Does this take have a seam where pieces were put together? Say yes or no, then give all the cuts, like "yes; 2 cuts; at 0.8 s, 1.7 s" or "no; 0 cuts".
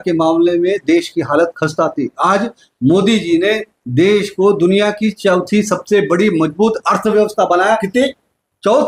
no; 0 cuts